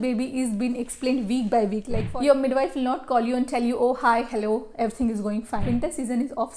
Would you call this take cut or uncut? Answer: cut